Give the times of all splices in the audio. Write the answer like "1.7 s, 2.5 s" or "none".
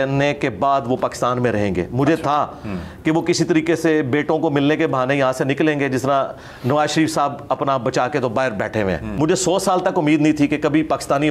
9.1 s